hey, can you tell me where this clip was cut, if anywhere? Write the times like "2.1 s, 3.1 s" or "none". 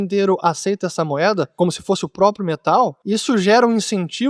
1.5 s, 3.0 s